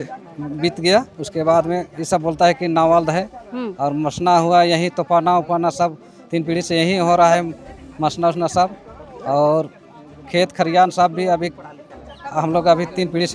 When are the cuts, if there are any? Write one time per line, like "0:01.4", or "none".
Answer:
none

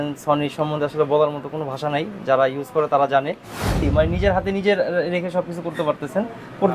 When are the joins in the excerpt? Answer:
0:03.8

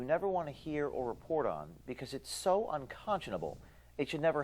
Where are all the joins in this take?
0:02.6

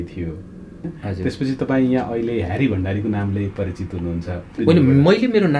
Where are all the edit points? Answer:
0:00.9
0:04.6

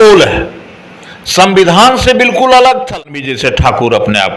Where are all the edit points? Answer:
0:03.5

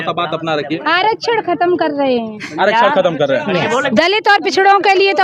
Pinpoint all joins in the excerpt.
0:03.9

